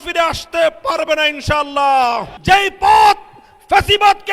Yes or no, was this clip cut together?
yes